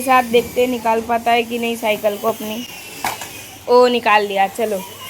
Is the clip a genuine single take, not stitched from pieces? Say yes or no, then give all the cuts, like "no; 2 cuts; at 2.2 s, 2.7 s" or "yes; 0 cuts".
yes; 0 cuts